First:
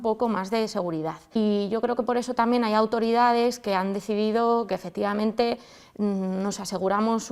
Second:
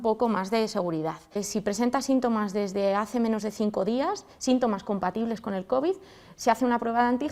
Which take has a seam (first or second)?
second